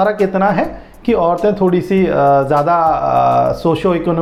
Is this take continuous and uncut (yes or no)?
yes